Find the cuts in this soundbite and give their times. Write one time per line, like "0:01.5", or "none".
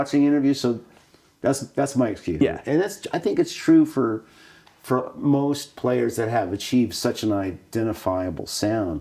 0:02.4